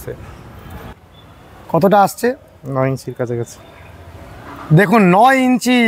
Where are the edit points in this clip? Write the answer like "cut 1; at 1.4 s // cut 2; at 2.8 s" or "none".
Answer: cut 1; at 0.9 s